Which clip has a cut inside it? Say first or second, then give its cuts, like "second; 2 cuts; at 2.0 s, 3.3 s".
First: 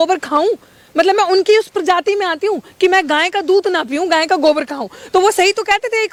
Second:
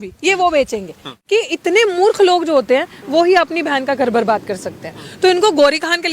second; 1 cut; at 1.1 s